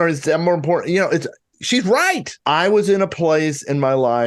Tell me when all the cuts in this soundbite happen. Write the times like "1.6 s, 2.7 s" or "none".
2.3 s